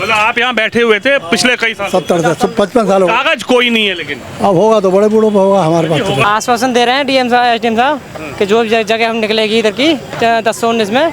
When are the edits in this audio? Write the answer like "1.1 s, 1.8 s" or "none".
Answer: 6.2 s